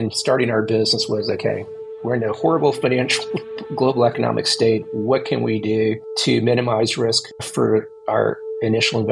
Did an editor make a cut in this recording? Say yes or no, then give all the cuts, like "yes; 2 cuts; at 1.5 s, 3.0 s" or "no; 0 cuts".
no; 0 cuts